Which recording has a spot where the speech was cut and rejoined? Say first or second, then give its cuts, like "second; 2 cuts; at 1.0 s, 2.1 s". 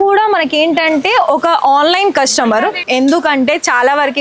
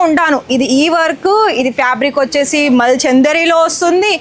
first; 1 cut; at 2.8 s